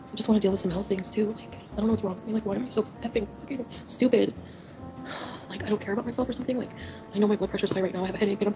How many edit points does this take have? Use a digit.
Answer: 0